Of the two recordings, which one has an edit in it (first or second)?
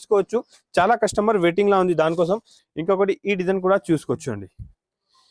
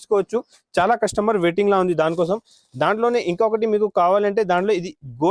first